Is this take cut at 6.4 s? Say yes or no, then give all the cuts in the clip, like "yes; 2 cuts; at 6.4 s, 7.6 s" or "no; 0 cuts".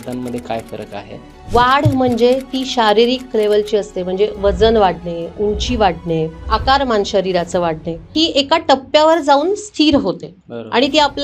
yes; 3 cuts; at 1.4 s, 6.4 s, 8.1 s